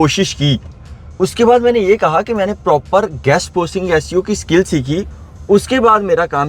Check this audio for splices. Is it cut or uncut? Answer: uncut